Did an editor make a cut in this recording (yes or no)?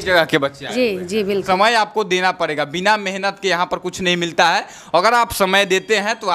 yes